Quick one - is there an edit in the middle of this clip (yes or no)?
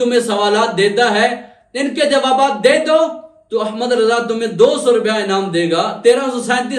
no